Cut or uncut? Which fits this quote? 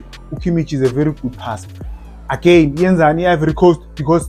uncut